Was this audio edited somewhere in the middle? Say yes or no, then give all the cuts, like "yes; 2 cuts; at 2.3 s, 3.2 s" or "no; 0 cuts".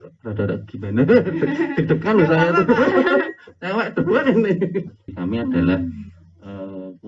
yes; 1 cut; at 5.0 s